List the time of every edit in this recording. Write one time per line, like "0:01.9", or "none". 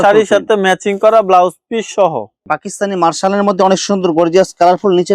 0:02.4